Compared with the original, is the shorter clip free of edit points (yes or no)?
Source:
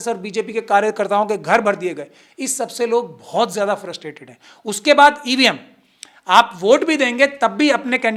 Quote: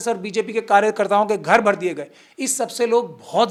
yes